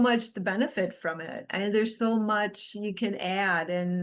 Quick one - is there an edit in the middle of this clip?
no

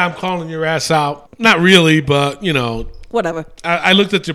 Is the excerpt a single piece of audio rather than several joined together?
no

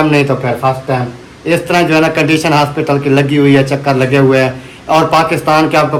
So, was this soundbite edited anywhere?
no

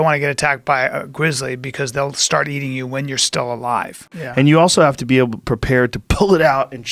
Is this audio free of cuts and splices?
no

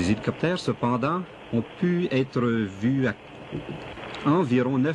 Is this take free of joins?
no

